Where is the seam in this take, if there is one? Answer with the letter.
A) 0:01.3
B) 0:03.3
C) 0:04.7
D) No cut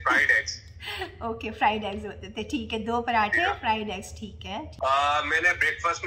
C